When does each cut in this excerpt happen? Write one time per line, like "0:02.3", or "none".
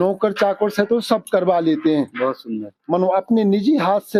none